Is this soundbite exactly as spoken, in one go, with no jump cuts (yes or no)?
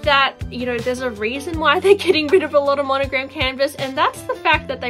yes